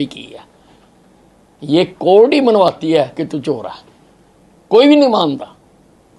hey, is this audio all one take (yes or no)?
yes